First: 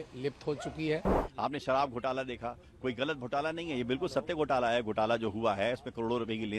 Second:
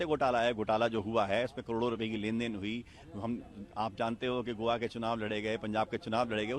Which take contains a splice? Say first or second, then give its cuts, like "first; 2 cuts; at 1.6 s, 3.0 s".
first; 1 cut; at 1.2 s